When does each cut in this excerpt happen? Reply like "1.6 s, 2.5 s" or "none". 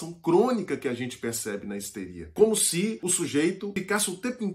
2.3 s, 3.0 s, 3.7 s